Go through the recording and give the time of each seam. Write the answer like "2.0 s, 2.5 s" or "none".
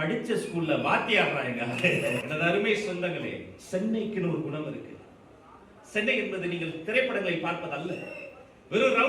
2.2 s